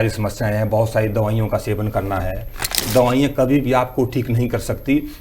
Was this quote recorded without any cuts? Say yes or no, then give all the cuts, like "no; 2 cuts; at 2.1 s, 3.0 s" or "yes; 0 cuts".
no; 1 cut; at 2.8 s